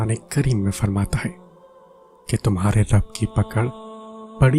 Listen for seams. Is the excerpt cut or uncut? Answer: uncut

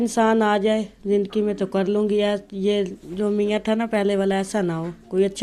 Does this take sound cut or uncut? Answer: uncut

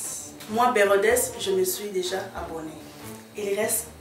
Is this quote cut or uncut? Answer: uncut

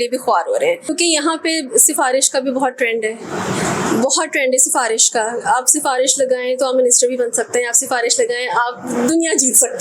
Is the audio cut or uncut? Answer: uncut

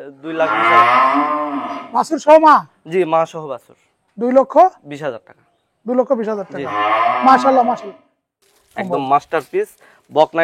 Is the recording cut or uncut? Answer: cut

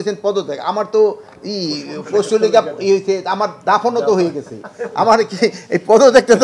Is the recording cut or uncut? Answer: uncut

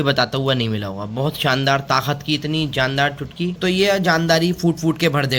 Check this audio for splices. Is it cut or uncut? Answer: cut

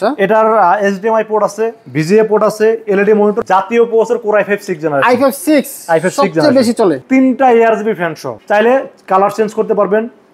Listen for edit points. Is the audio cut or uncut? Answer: cut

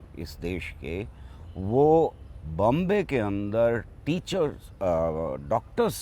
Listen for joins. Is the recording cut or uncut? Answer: uncut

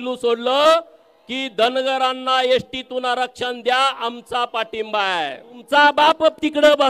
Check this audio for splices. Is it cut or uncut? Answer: cut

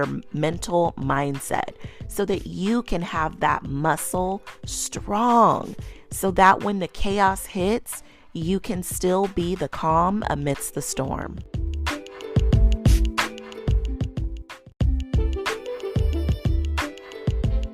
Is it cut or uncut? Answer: cut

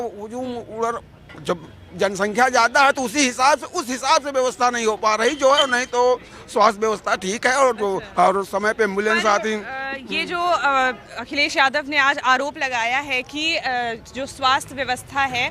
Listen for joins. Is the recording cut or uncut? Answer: uncut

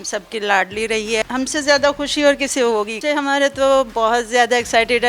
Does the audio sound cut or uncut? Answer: cut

